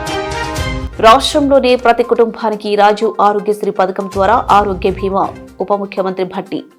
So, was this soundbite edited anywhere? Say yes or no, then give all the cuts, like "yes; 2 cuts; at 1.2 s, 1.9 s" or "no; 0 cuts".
no; 0 cuts